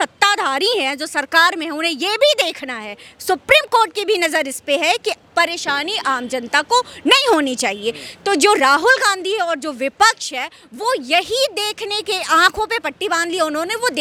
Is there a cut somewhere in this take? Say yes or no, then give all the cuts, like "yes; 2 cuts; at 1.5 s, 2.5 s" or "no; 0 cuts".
no; 0 cuts